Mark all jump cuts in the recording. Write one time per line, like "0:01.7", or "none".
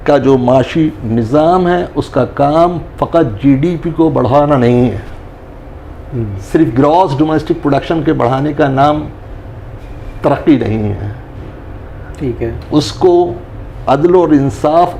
none

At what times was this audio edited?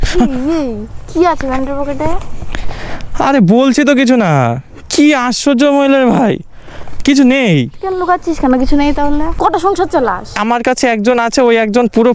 0:09.3
0:10.4

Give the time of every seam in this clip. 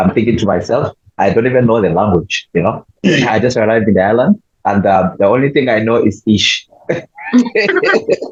none

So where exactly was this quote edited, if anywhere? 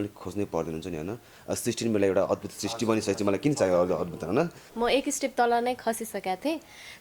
0:04.7

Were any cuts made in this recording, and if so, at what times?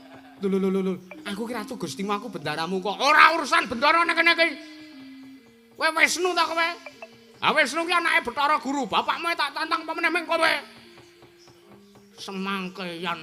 none

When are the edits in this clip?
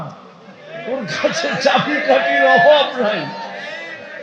none

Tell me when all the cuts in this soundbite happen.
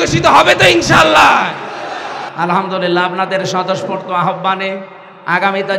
0:02.2

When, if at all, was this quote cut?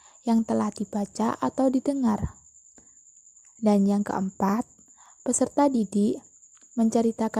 none

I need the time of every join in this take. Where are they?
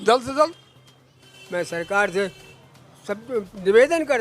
0:01.2

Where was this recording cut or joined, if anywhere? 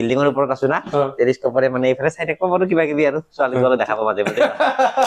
none

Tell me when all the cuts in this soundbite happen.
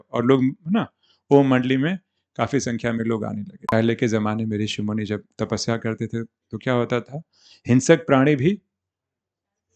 0:03.5

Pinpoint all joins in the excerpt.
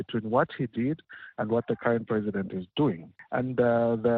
0:03.1

